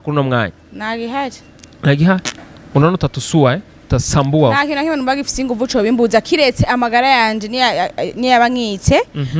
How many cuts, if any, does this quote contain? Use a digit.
0